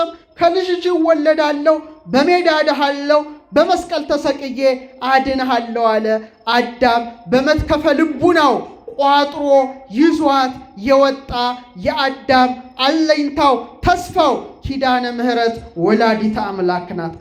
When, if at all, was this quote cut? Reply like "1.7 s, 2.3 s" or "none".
none

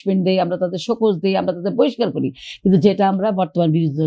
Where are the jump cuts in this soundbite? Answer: none

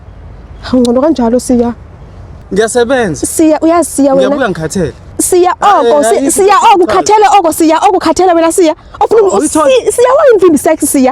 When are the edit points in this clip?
2.4 s

